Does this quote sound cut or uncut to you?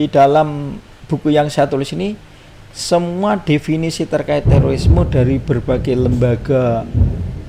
uncut